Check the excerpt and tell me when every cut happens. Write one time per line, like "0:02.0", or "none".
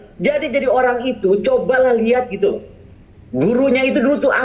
none